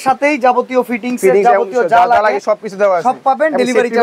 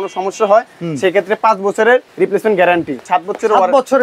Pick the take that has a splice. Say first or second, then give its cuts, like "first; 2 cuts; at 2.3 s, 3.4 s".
second; 2 cuts; at 2.1 s, 3.0 s